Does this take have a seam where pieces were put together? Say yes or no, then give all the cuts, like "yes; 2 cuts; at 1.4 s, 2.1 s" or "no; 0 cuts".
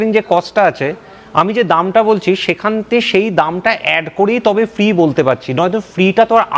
no; 0 cuts